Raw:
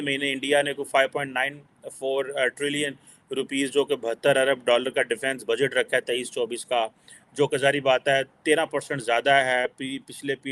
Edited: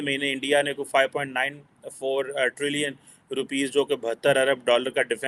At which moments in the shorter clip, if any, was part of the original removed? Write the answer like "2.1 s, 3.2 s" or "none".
none